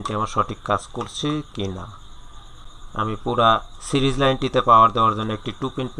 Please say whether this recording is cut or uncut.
cut